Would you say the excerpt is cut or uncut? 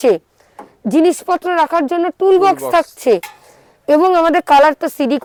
uncut